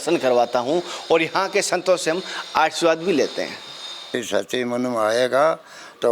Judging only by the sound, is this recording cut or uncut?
cut